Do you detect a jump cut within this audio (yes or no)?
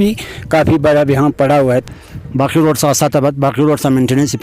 yes